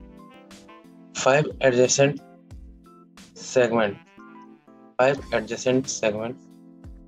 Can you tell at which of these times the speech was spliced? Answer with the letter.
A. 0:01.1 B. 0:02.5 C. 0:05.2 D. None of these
A